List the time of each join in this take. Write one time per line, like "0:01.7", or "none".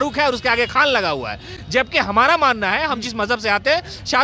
none